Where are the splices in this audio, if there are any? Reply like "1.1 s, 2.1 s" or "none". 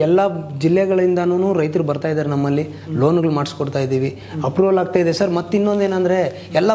none

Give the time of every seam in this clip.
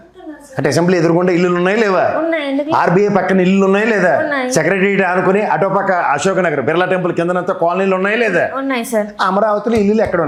none

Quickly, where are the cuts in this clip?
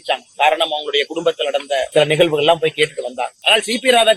1.9 s, 3.4 s

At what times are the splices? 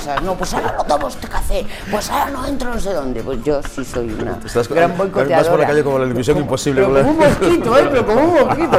none

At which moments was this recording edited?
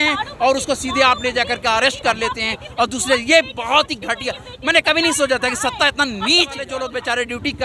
6.8 s

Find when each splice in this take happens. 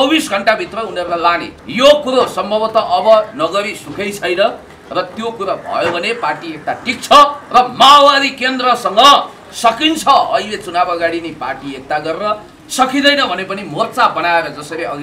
1.5 s

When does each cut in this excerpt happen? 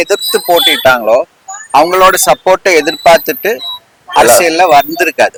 none

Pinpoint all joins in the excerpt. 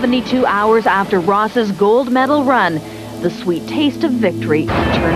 none

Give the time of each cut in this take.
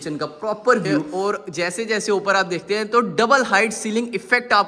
1.1 s

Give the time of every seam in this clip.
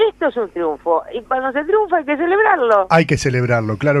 2.6 s

